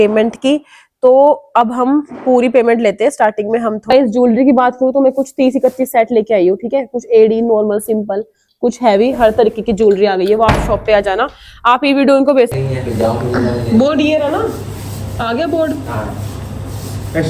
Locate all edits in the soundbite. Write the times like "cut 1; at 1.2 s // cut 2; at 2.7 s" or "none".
cut 1; at 3.8 s // cut 2; at 12.6 s